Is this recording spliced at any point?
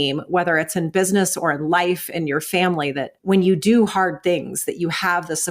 yes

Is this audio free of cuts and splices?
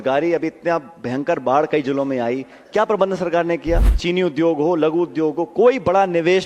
no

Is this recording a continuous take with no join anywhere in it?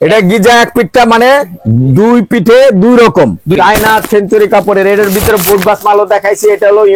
no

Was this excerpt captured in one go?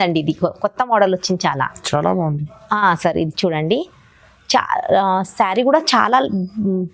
yes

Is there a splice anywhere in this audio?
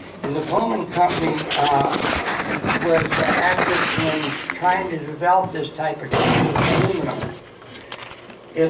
no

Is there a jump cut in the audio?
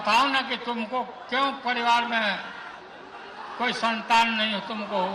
no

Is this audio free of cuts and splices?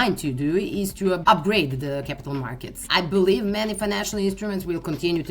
no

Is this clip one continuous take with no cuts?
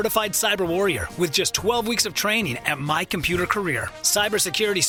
yes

